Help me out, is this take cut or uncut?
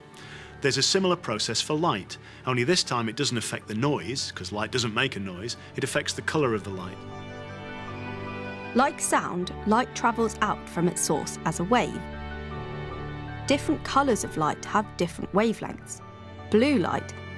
cut